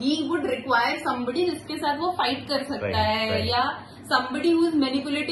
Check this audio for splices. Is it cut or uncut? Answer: uncut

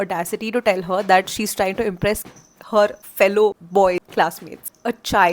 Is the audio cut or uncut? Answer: uncut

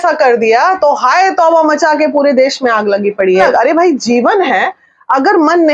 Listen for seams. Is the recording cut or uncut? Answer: cut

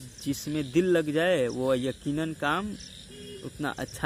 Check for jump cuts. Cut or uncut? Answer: uncut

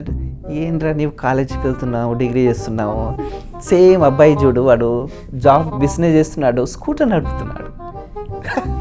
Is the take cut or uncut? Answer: uncut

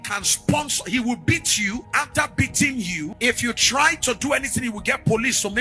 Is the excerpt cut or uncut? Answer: cut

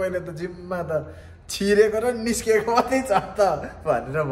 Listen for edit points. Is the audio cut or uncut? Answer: uncut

